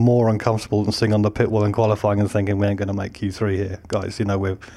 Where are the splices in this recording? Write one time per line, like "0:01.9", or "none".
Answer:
none